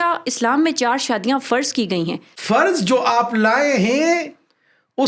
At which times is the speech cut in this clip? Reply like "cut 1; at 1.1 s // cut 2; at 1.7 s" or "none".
cut 1; at 2.3 s